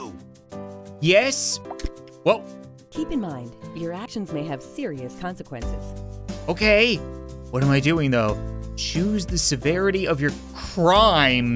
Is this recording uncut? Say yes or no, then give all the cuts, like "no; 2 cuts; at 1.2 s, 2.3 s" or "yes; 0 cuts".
no; 1 cut; at 1.0 s